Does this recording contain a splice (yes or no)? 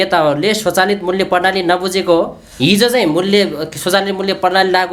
no